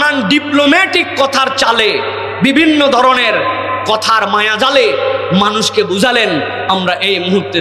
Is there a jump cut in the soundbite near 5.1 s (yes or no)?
no